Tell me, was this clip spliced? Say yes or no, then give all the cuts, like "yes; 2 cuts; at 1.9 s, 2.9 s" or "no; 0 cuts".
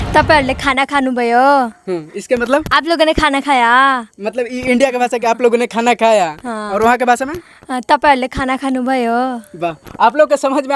no; 0 cuts